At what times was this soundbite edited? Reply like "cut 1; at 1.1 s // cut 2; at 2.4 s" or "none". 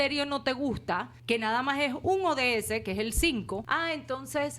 cut 1; at 1.1 s // cut 2; at 3.6 s